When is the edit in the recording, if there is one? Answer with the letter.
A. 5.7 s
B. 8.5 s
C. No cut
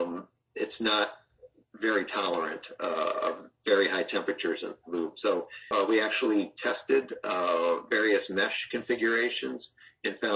A